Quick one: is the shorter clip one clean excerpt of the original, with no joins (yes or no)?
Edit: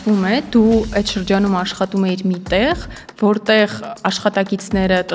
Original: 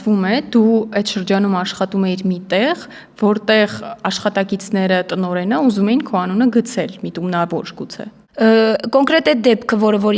yes